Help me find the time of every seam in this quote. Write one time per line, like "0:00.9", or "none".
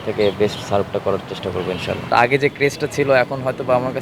0:02.1